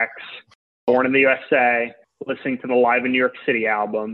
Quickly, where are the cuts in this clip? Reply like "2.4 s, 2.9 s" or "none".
0.9 s, 2.0 s